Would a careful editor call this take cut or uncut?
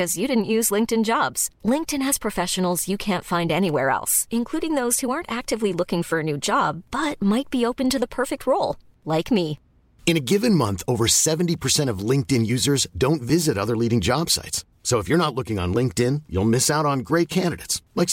uncut